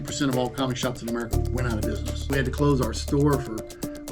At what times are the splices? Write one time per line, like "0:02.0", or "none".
0:02.3